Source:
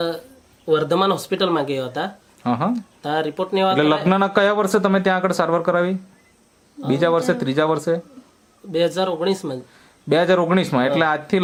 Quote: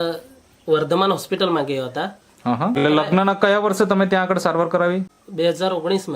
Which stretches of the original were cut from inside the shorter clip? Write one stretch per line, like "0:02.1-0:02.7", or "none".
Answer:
0:02.8-0:03.7
0:06.1-0:08.5